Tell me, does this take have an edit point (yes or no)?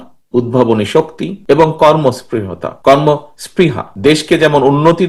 no